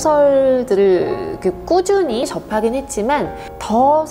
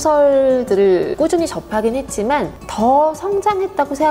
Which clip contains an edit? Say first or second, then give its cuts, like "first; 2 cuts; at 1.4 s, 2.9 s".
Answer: second; 2 cuts; at 1.4 s, 2.6 s